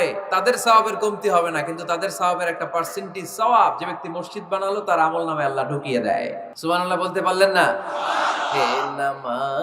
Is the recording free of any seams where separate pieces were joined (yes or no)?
no